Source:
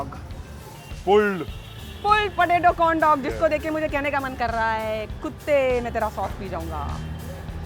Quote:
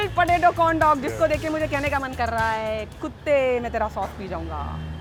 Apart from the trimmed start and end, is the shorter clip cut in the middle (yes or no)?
no